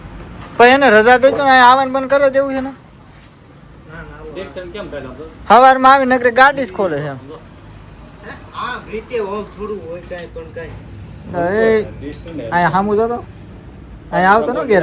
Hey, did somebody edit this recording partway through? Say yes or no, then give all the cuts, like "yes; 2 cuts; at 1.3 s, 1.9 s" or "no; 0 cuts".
no; 0 cuts